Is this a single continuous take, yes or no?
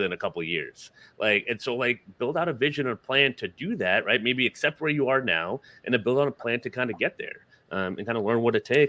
yes